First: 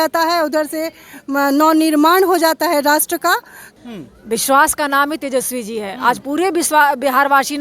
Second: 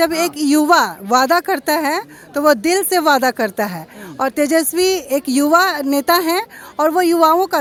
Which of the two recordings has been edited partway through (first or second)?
first